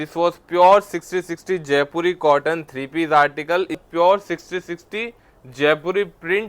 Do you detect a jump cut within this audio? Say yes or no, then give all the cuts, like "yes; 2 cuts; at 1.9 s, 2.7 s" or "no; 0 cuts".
yes; 1 cut; at 3.8 s